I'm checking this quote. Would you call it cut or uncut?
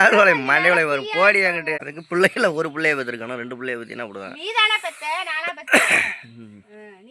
cut